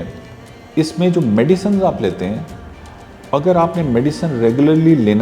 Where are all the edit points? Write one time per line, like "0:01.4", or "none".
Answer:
none